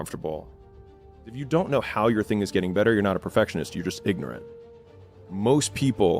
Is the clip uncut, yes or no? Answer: no